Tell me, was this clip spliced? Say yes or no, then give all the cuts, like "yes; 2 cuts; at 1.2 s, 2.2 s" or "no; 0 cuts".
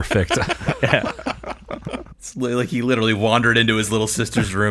yes; 1 cut; at 2.3 s